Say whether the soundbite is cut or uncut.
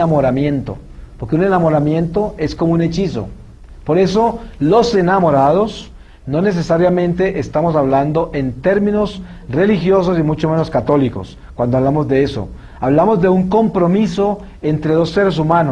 cut